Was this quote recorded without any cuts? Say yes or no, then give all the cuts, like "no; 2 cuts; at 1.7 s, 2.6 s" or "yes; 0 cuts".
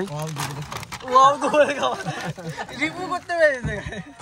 yes; 0 cuts